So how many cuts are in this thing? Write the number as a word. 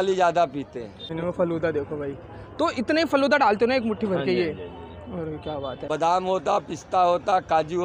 two